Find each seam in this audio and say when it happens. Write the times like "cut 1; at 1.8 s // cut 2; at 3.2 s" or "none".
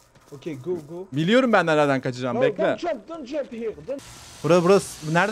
cut 1; at 4.0 s